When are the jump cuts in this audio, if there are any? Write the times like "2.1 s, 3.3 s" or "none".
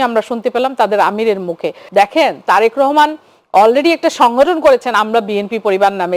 1.8 s